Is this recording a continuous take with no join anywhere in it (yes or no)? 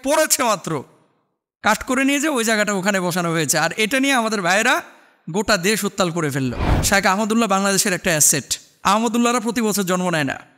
no